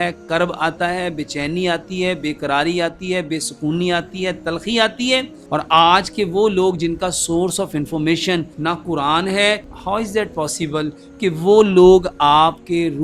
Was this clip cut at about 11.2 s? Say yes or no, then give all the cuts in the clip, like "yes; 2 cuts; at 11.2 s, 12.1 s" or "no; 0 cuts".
no; 3 cuts; at 5.4 s, 8.5 s, 9.7 s